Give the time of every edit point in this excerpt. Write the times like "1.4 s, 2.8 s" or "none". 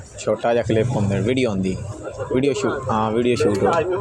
none